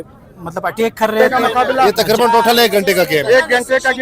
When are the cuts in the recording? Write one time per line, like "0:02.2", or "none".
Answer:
0:01.2